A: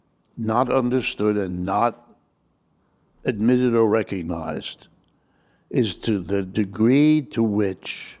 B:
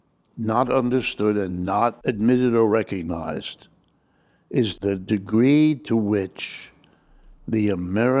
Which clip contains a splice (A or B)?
B